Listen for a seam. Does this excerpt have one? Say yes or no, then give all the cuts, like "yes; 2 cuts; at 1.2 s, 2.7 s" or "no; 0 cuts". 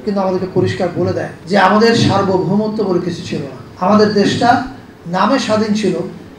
yes; 2 cuts; at 1.3 s, 3.6 s